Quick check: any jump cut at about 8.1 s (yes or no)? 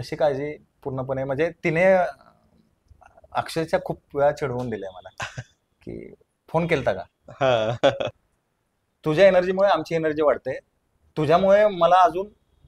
yes